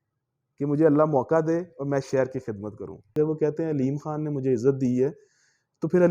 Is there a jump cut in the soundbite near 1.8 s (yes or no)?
no